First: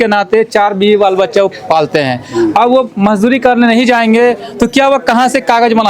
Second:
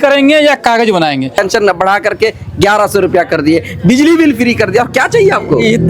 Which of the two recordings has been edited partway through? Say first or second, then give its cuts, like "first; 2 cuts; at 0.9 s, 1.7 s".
second; 1 cut; at 1.4 s